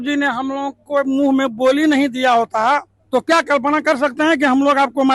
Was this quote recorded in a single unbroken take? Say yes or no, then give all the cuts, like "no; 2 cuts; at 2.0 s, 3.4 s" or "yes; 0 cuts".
no; 1 cut; at 2.9 s